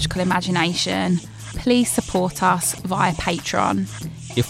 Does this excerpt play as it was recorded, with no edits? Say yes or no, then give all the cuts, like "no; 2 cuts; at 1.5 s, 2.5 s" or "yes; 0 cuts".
yes; 0 cuts